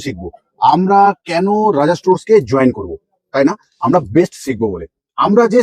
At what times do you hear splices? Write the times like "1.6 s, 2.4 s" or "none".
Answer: none

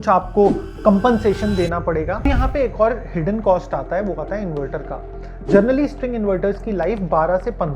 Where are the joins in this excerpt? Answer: 2.2 s

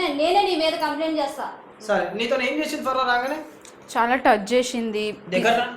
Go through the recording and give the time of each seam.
1.6 s

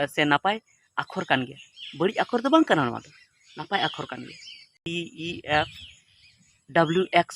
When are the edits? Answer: 4.8 s

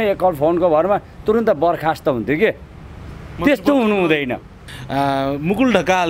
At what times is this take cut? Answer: 4.6 s

